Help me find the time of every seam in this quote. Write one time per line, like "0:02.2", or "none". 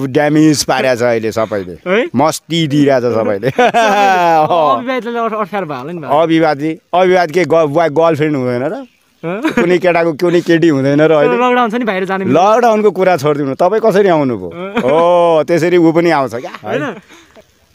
0:16.6

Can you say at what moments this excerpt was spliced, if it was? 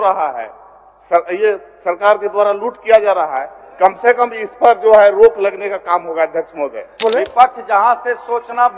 0:07.0

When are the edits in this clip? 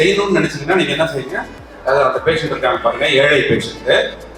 none

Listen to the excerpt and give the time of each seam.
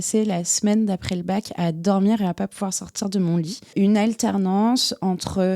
0:03.7

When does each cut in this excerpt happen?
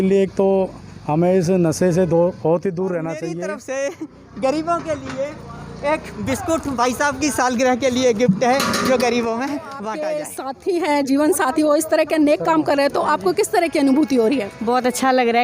0:03.3
0:09.8

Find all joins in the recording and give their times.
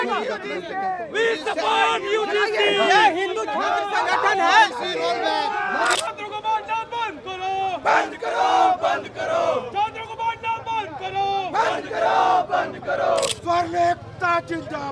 0:05.9
0:13.3

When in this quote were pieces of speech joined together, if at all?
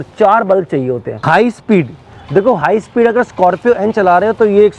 0:01.1

